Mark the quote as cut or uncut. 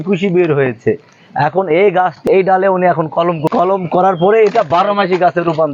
cut